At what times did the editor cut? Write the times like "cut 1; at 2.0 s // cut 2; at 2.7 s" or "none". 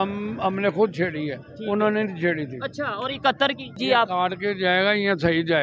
cut 1; at 3.8 s